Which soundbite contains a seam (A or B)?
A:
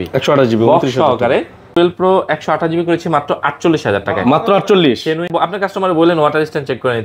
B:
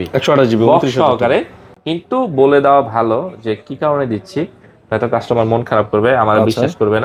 A